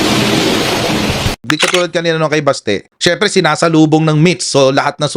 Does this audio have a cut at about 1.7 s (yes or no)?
yes